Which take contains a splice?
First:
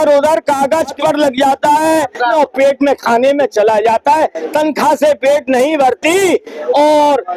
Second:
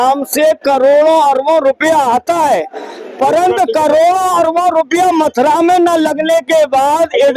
first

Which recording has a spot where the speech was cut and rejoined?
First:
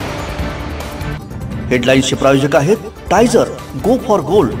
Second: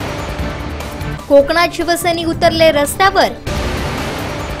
second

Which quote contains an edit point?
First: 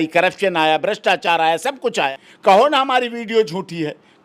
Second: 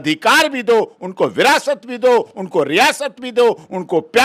first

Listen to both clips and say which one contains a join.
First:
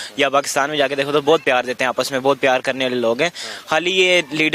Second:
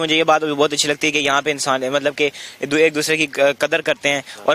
first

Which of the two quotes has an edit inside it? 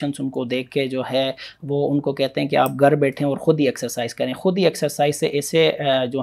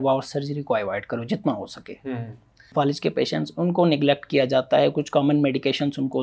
second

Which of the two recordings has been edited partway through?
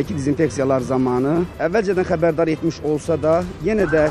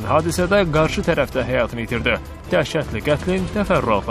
first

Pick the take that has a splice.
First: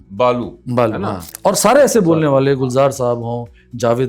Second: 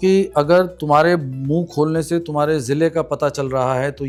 first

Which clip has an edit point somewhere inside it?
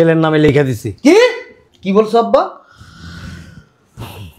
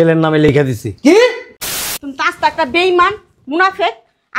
second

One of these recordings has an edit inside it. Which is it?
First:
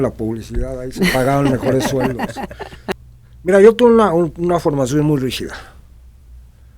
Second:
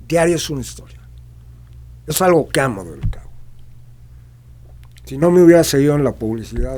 first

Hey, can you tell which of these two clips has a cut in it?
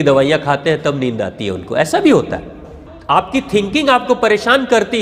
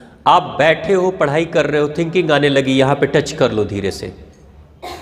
first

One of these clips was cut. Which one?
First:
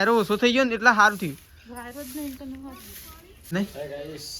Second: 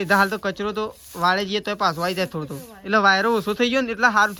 first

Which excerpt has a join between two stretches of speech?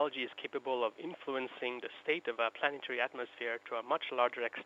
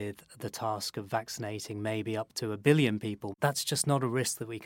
second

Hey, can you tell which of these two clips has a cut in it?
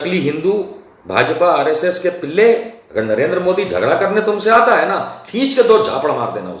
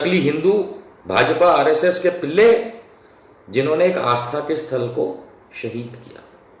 first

